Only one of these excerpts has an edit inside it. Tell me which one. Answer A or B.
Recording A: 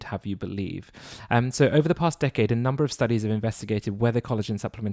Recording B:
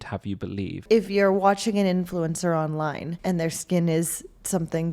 B